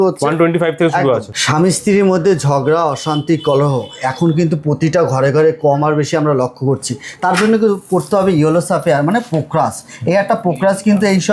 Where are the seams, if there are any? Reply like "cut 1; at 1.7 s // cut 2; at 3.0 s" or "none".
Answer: none